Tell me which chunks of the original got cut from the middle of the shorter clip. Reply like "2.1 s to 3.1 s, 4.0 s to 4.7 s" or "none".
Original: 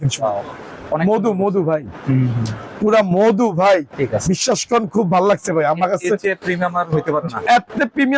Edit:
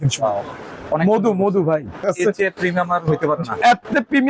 2.0 s to 5.9 s